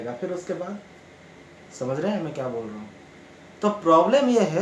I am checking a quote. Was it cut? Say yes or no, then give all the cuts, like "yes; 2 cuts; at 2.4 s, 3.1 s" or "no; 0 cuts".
no; 0 cuts